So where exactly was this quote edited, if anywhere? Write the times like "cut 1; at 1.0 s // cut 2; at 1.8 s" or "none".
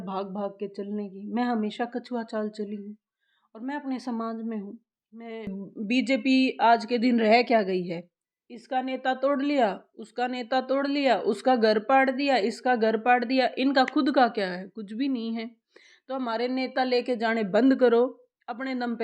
cut 1; at 5.7 s